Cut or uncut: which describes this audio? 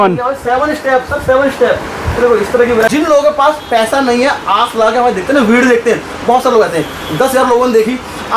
cut